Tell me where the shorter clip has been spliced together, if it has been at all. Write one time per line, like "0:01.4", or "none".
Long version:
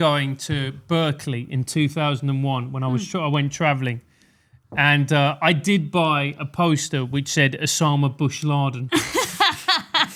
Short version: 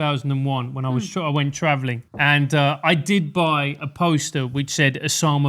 0:02.0